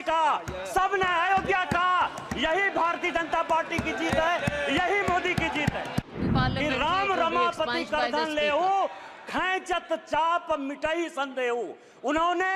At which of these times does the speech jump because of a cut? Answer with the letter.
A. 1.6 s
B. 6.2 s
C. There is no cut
B